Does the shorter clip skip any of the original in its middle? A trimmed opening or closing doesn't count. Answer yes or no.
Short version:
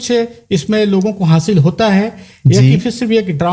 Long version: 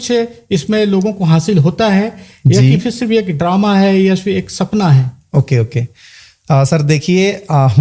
no